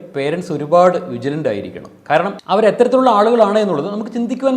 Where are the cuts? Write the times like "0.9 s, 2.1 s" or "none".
none